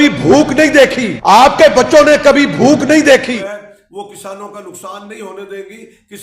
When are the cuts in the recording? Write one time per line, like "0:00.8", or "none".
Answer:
0:03.3